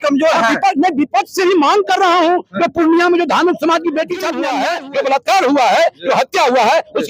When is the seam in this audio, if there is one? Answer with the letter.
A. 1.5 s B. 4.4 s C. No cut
B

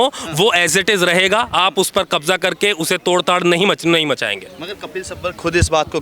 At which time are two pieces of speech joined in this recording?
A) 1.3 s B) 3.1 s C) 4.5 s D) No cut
D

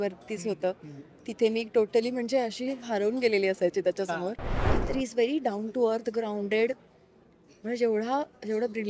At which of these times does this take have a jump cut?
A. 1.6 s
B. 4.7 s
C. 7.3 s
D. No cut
B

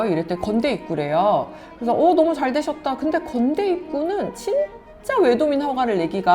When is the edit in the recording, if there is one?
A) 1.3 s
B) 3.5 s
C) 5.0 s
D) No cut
D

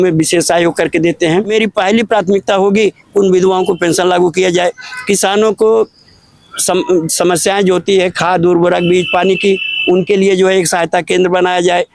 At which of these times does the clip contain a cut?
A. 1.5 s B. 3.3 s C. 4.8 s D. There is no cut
A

